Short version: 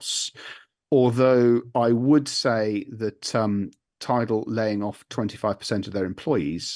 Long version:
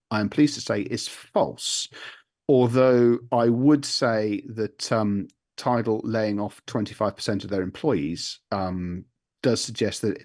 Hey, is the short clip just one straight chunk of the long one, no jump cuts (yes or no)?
yes